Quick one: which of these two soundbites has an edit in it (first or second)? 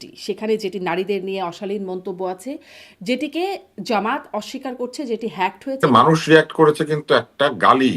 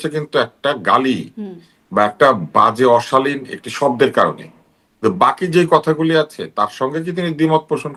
first